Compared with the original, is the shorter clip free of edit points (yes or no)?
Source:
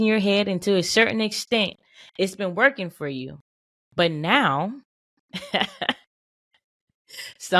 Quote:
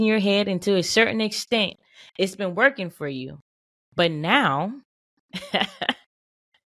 yes